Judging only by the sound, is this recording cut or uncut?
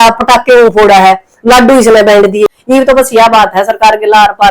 cut